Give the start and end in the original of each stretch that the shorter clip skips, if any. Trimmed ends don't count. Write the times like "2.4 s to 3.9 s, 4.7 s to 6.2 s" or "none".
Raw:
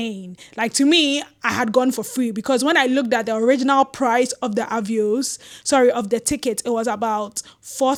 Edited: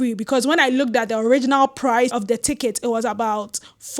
4.3 s to 5.9 s